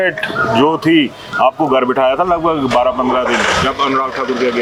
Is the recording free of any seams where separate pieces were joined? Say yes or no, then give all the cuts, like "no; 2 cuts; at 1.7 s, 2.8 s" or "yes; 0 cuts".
yes; 0 cuts